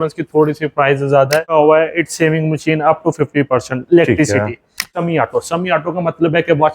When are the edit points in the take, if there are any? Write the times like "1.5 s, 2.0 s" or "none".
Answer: 1.5 s, 4.9 s

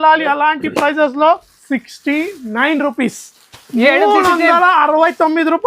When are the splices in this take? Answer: 1.5 s

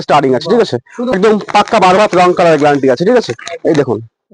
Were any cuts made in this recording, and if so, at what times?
1.1 s

